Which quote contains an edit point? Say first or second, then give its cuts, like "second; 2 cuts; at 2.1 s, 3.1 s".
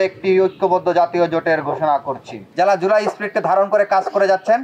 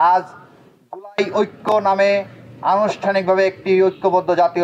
first; 1 cut; at 2.4 s